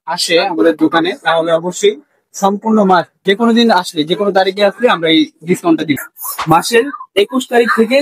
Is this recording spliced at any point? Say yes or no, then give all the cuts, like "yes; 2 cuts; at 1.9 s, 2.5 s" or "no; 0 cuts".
yes; 1 cut; at 6.1 s